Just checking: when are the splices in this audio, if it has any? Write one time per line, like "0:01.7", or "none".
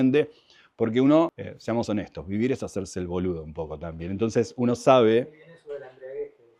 none